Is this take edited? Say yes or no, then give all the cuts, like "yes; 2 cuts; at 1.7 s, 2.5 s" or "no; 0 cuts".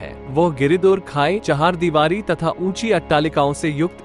yes; 1 cut; at 1.4 s